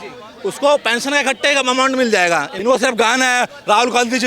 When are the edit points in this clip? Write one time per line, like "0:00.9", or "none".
0:02.5

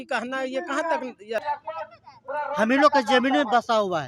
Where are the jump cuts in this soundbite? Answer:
0:01.4

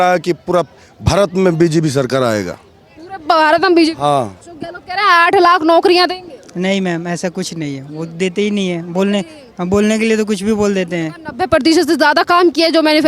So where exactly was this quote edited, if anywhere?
0:04.4

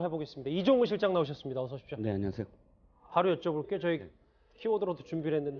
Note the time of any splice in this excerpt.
0:01.5

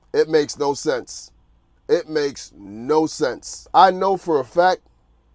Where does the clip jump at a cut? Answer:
0:03.5

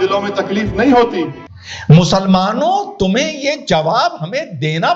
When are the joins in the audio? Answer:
0:01.4

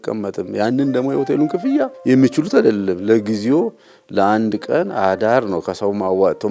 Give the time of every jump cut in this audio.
0:01.9

